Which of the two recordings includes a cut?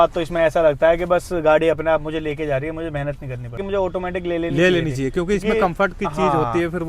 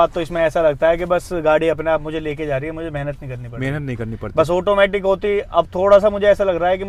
first; 1 cut; at 3.6 s

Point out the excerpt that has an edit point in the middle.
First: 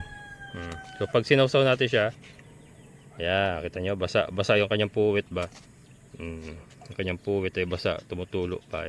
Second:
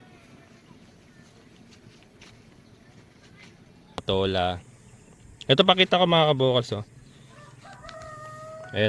second; 1 cut; at 4.0 s

